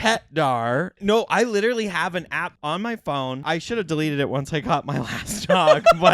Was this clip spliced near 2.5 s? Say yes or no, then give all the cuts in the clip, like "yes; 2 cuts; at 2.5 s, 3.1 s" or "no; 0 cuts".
yes; 3 cuts; at 0.9 s, 2.5 s, 3.4 s